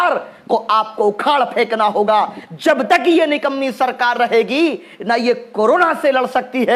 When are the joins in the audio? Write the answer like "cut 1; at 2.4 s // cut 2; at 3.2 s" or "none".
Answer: none